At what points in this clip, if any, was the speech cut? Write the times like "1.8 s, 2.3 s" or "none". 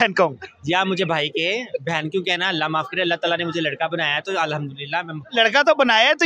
none